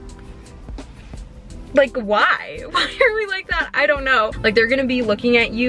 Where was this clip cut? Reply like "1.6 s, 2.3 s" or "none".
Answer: 4.3 s